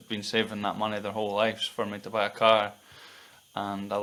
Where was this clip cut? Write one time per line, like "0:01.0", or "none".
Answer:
none